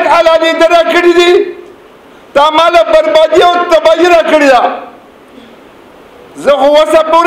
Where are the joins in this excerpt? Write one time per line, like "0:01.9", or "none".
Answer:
none